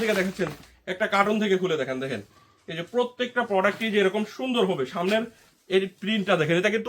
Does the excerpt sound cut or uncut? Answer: uncut